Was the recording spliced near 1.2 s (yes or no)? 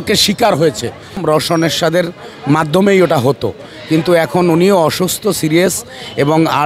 yes